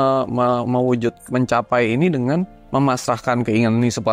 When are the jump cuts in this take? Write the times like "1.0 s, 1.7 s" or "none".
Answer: none